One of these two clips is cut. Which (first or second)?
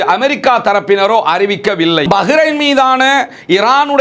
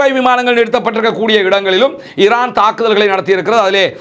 first